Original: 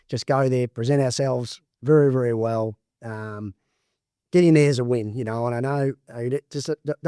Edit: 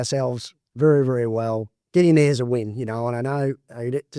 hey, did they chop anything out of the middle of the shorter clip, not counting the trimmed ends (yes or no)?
yes